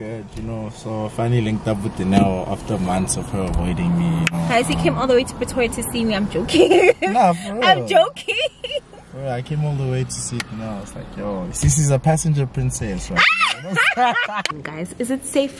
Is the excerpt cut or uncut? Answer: cut